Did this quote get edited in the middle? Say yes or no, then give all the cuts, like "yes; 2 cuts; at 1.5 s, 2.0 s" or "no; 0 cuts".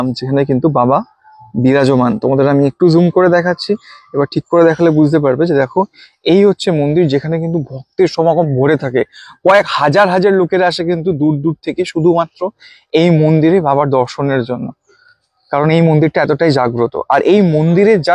no; 0 cuts